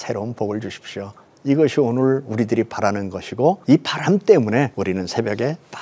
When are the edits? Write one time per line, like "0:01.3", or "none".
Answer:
0:03.6
0:04.7